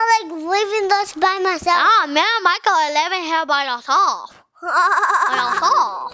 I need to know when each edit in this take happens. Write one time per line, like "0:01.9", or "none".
none